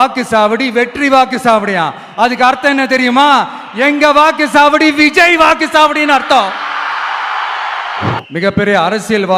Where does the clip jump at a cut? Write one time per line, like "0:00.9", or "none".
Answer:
0:08.2